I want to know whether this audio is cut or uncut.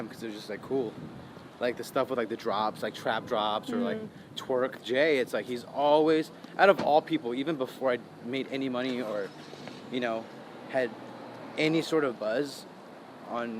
cut